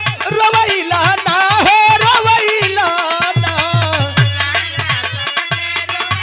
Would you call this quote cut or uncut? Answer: uncut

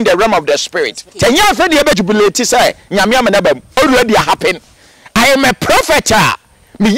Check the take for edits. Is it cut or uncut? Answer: cut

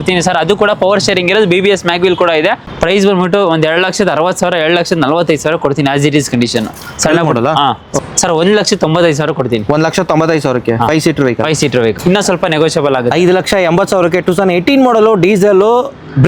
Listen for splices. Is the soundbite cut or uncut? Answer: cut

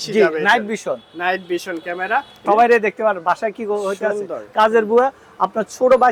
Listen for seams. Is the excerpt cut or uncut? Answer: cut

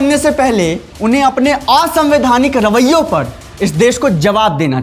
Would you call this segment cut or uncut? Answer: uncut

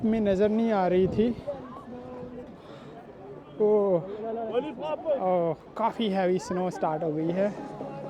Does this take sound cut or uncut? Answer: uncut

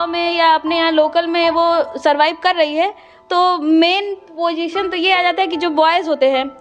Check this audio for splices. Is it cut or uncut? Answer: uncut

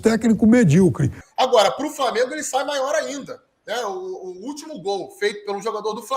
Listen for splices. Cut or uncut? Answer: cut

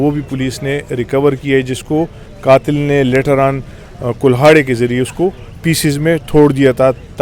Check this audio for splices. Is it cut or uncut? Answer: uncut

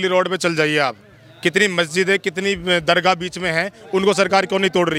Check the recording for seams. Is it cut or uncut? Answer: uncut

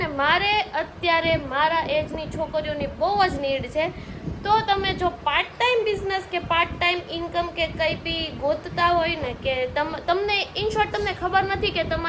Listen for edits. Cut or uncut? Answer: uncut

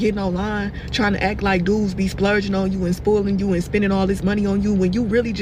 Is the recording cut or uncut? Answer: uncut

